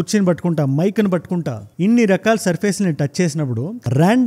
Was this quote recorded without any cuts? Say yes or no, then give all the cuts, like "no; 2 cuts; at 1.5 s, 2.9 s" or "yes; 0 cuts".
no; 1 cut; at 1.6 s